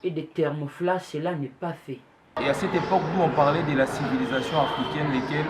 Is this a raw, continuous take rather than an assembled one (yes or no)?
no